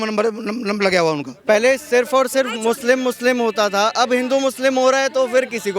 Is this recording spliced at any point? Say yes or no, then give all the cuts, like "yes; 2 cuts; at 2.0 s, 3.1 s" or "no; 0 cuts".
yes; 1 cut; at 1.3 s